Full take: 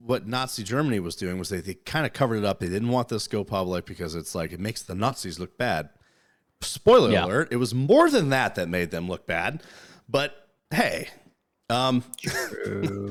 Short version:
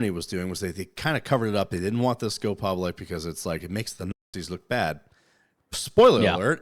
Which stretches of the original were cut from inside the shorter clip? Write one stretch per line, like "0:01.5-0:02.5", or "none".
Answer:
none